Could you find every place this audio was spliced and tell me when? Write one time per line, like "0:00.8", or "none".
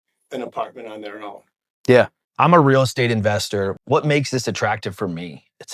0:02.2